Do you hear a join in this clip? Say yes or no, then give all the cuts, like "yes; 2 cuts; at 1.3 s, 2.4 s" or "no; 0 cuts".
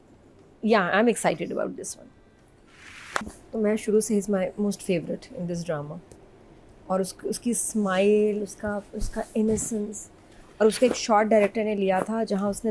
yes; 1 cut; at 3.1 s